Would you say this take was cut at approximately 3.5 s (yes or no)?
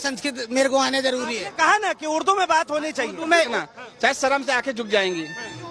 yes